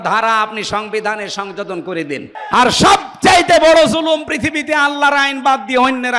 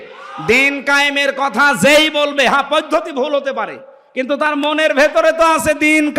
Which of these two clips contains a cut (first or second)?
first